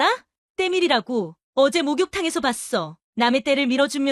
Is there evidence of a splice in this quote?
no; 0 cuts

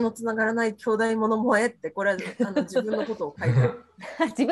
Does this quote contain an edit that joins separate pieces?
no; 0 cuts

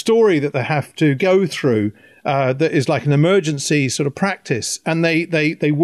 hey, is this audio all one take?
yes; 0 cuts

